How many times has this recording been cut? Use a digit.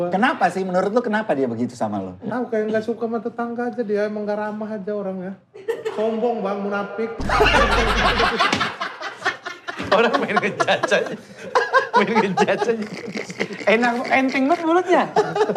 0